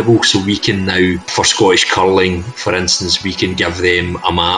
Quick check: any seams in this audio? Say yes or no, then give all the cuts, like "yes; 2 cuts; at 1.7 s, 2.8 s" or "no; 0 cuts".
yes; 1 cut; at 1.3 s